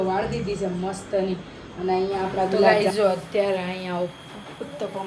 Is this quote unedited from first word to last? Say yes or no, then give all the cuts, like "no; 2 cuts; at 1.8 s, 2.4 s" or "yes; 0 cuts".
no; 1 cut; at 2.7 s